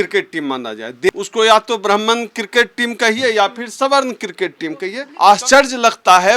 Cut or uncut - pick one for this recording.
cut